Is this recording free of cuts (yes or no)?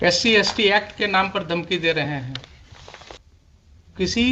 no